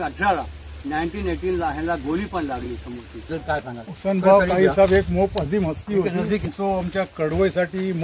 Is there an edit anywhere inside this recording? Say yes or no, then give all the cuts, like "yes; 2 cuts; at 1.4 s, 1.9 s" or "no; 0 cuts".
yes; 2 cuts; at 3.3 s, 6.4 s